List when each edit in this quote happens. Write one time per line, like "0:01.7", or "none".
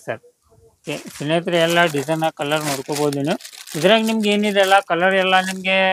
none